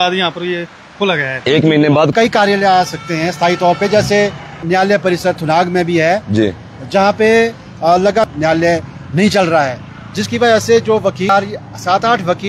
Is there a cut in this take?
yes; 4 cuts; at 2.1 s, 4.6 s, 8.3 s, 11.3 s

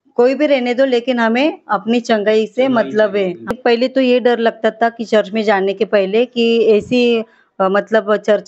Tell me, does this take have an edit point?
yes; 1 cut; at 3.5 s

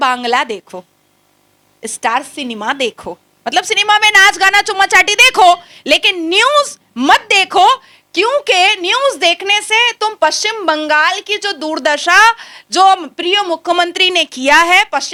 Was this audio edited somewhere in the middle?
no; 0 cuts

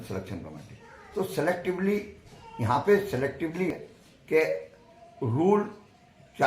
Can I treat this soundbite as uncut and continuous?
no; 1 cut; at 3.7 s

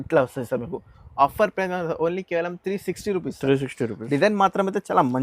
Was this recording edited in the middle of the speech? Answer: no; 0 cuts

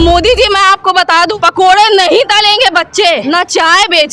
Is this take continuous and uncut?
no; 2 cuts; at 1.3 s, 3.2 s

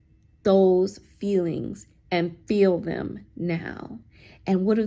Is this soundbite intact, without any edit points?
yes; 0 cuts

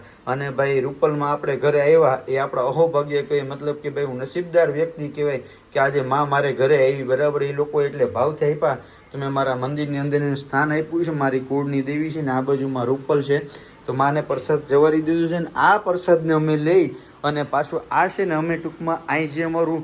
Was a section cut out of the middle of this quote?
no; 0 cuts

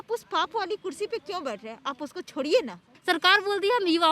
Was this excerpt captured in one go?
no; 1 cut; at 2.9 s

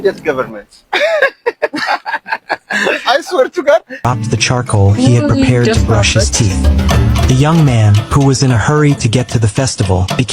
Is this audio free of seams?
no; 1 cut; at 4.1 s

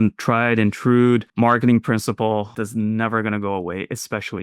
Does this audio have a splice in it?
yes; 2 cuts; at 1.3 s, 2.6 s

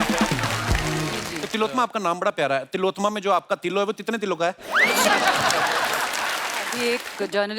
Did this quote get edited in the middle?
yes; 2 cuts; at 1.3 s, 6.7 s

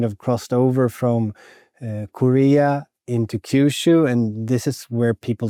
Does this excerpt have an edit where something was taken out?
no; 0 cuts

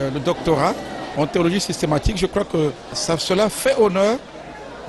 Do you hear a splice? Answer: yes; 2 cuts; at 1.0 s, 2.9 s

